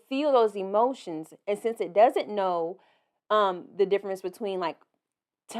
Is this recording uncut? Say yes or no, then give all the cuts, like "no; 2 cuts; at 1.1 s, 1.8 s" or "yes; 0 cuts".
yes; 0 cuts